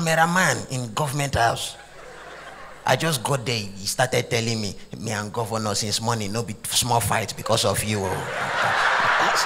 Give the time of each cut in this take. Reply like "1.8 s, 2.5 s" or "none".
none